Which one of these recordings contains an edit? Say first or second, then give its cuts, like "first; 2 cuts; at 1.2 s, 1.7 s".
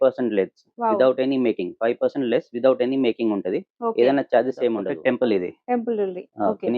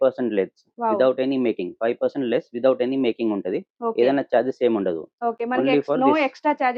first; 1 cut; at 4.9 s